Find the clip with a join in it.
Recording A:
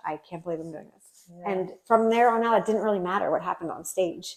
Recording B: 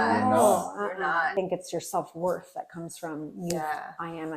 B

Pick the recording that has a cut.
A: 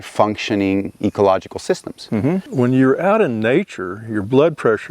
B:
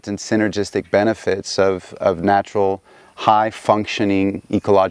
A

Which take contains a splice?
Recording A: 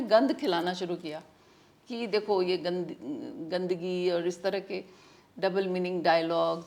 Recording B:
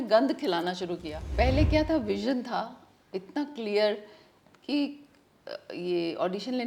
B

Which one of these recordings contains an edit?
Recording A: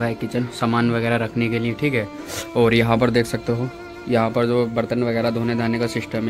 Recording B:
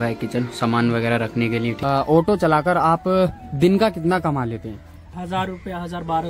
B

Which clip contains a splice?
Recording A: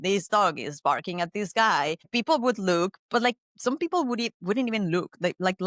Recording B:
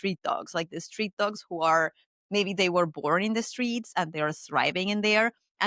A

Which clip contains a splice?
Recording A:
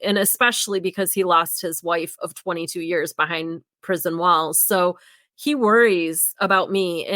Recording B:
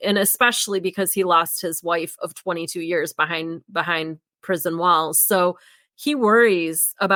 A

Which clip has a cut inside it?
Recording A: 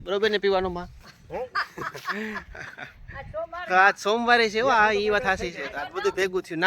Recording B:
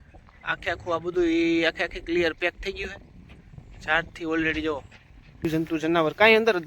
B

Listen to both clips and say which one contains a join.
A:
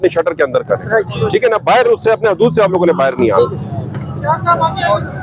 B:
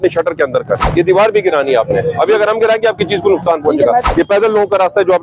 B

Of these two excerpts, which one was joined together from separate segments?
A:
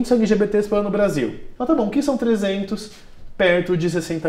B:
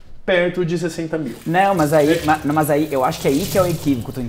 A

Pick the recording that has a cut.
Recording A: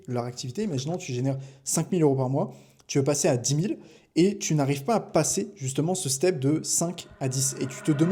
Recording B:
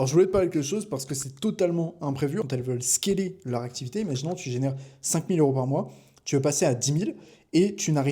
B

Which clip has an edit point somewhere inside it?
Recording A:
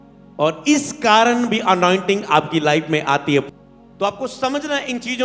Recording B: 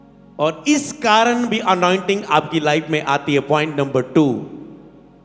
A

